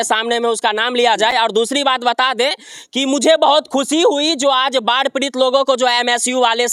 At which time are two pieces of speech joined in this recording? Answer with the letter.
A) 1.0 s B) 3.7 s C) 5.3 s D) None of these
D